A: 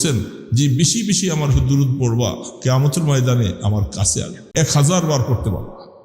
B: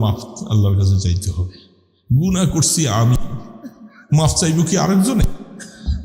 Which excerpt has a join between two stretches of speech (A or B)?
A